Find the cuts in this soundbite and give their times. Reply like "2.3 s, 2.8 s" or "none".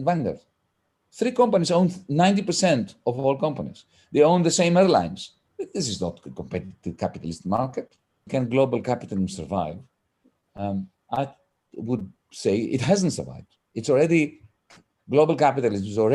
8.3 s

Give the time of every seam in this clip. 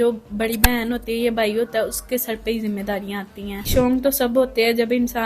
3.7 s

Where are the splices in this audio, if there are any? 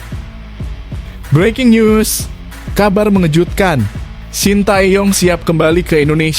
1.3 s

